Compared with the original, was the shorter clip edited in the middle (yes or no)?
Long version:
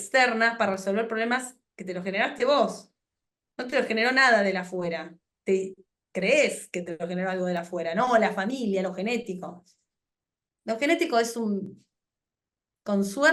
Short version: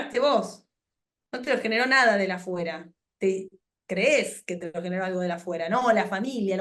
no